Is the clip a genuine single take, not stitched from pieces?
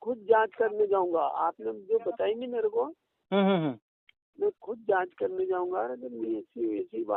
yes; 0 cuts

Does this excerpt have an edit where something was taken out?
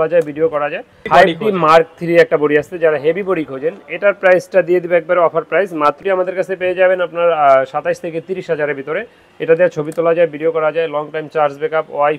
yes; 2 cuts; at 1.0 s, 6.0 s

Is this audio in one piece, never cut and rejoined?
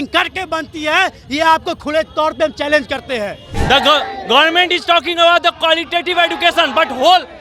no; 1 cut; at 3.5 s

